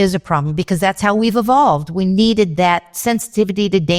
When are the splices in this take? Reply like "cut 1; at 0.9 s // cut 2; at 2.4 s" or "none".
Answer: cut 1; at 2.9 s